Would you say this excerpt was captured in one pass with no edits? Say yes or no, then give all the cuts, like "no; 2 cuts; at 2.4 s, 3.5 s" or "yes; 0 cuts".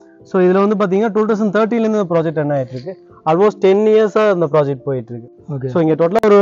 yes; 0 cuts